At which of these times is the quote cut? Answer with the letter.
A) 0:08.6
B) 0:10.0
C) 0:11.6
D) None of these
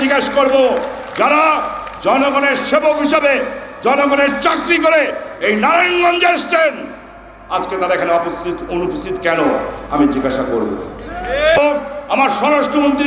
C